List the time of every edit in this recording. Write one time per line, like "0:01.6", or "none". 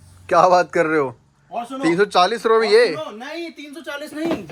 none